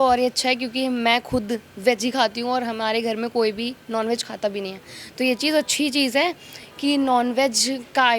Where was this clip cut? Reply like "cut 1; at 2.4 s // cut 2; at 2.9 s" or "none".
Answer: none